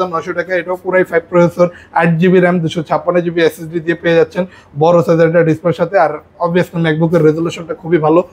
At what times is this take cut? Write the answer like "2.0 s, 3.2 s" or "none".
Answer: none